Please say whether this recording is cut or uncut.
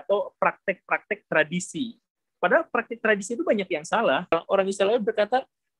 cut